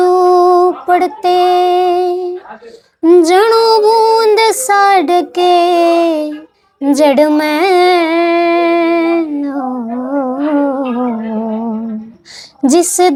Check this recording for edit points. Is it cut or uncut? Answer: uncut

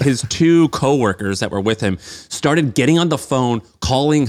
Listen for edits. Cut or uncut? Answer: uncut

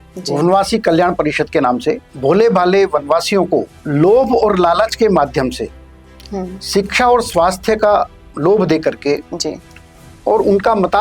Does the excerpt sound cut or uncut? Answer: cut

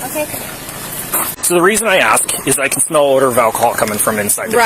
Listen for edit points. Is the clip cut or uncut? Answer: cut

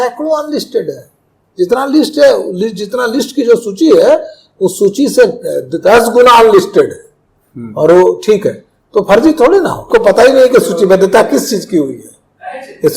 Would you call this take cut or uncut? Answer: cut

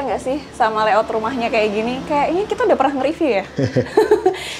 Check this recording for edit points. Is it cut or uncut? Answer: uncut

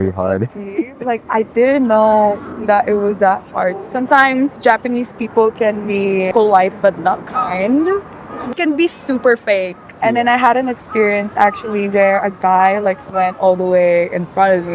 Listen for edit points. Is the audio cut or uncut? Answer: cut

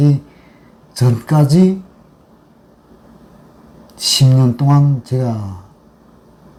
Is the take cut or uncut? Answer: uncut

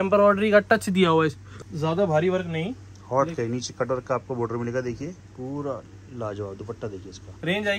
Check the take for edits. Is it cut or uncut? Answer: uncut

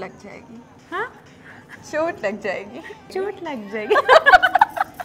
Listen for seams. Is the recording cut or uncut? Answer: cut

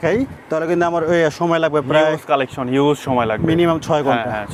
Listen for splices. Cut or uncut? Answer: uncut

